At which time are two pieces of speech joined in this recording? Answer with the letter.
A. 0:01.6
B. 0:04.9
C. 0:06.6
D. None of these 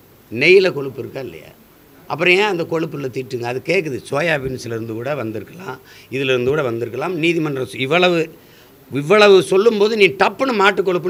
D